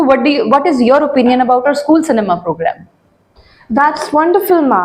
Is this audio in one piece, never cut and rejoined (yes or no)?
yes